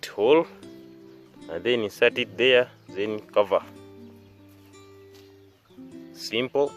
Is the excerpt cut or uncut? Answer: uncut